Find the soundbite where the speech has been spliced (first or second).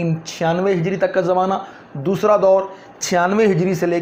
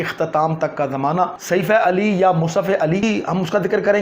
second